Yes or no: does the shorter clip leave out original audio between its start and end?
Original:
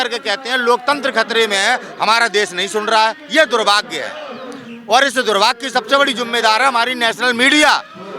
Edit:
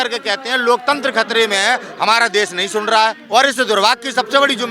yes